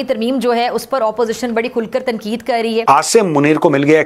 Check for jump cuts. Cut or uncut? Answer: cut